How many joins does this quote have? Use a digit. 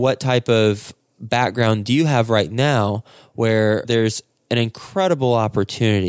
1